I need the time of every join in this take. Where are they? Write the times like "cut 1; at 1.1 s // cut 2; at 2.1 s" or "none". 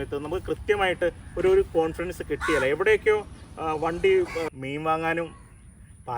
cut 1; at 4.5 s